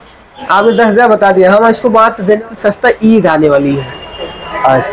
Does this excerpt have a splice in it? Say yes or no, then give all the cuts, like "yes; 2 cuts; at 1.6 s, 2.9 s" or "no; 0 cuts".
yes; 1 cut; at 2.4 s